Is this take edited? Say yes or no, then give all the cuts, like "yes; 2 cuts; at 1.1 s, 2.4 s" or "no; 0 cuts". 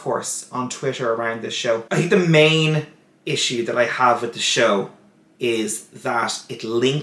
yes; 1 cut; at 1.8 s